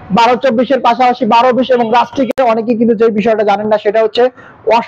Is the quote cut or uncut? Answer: cut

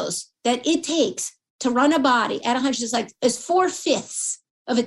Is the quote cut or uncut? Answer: cut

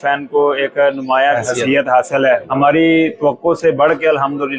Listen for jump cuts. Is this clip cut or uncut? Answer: cut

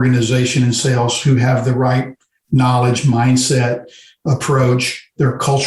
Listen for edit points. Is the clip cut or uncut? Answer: cut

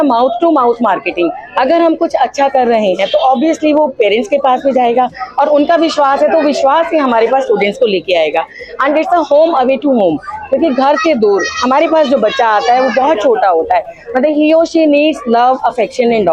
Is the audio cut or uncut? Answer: uncut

